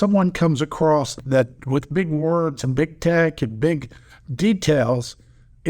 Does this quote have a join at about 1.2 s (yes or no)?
yes